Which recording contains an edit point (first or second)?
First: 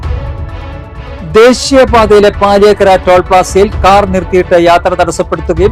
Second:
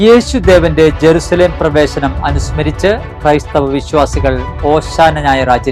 first